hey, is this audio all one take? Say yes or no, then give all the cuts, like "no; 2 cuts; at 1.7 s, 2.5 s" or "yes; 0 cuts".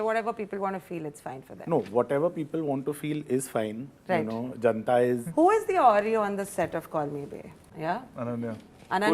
no; 2 cuts; at 5.2 s, 7.7 s